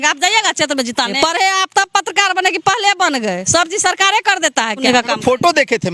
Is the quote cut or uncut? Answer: cut